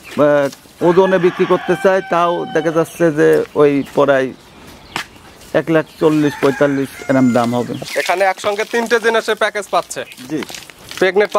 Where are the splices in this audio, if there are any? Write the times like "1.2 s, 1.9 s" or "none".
7.8 s